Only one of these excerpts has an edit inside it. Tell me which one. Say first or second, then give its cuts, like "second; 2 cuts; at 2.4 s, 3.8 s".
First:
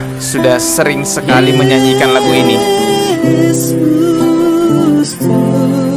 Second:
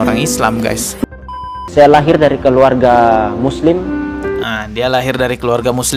second; 1 cut; at 1.0 s